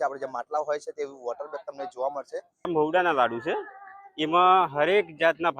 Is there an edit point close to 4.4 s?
no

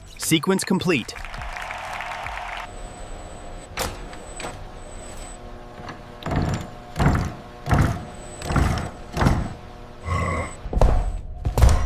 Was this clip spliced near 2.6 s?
yes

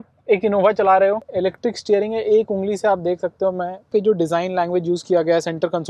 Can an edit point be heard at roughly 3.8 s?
yes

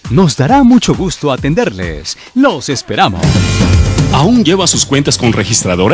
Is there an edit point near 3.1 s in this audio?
yes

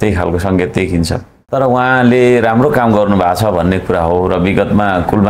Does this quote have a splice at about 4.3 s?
no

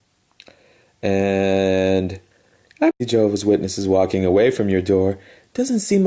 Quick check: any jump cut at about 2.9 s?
no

